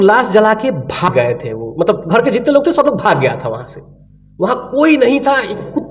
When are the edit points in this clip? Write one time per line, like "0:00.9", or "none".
0:01.1

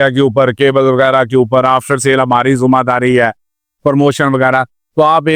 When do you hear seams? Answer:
none

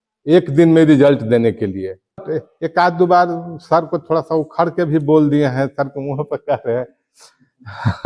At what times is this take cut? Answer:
0:02.2

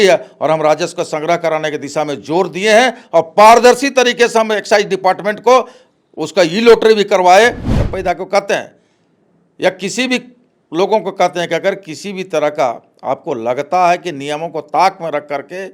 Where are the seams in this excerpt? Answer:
0:07.7

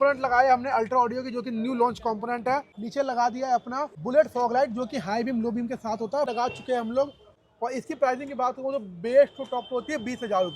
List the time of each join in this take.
0:02.8
0:03.9
0:06.3
0:07.3

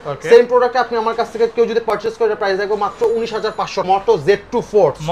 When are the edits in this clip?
0:03.9

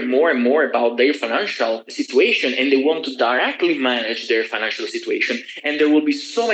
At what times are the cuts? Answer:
0:01.9

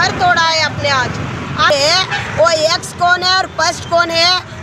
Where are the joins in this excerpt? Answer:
0:01.7

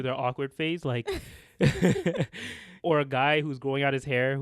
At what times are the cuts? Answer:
0:02.8

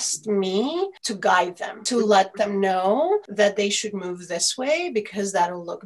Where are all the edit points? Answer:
none

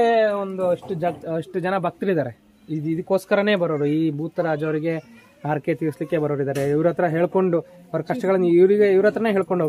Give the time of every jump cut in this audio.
none

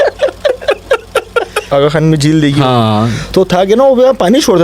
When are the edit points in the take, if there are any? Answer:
0:01.6
0:03.2

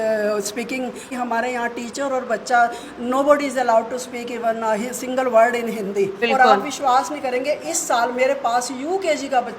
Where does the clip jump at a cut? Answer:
0:01.1
0:06.2

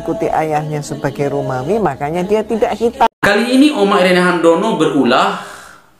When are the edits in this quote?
0:03.2

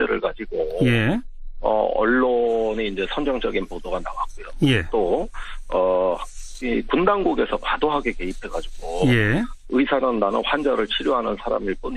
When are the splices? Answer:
0:03.9

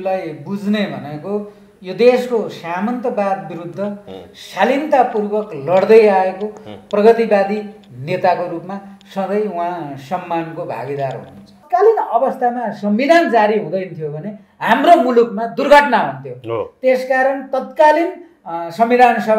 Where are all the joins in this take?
0:11.6

